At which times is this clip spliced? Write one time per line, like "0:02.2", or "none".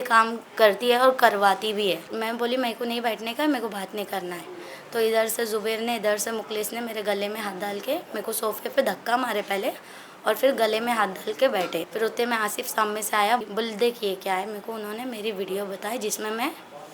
0:02.2
0:11.9
0:13.4